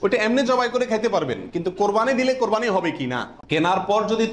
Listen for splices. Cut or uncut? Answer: cut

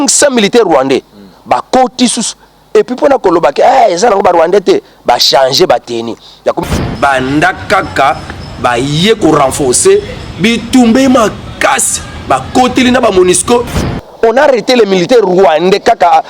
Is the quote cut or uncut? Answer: cut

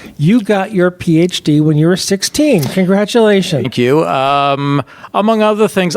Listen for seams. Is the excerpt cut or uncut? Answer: cut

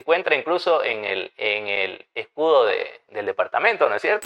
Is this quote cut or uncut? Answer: uncut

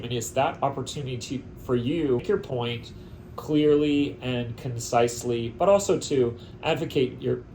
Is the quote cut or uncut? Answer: cut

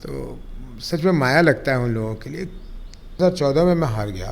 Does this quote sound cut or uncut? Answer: cut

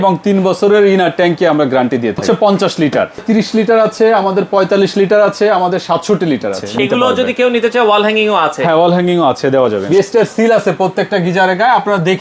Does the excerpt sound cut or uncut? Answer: cut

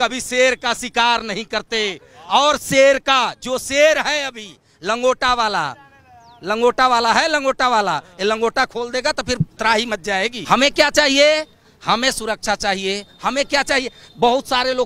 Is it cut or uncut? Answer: cut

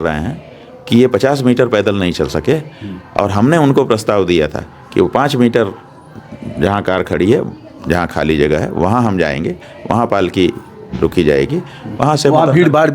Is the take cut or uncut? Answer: uncut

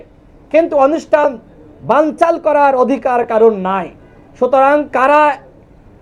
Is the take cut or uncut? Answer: uncut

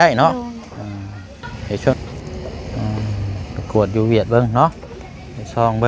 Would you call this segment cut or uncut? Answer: cut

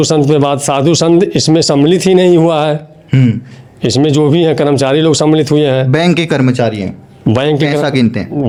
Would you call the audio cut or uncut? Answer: uncut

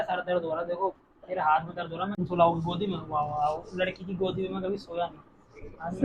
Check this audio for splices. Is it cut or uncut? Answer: cut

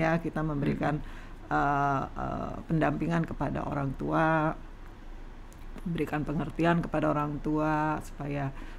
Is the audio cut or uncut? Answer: uncut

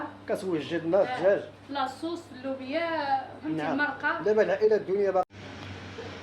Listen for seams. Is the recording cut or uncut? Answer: cut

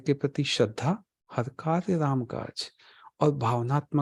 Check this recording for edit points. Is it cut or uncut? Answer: uncut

